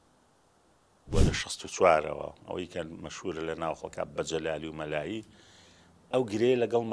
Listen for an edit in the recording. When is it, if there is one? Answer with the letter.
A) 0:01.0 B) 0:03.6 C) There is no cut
A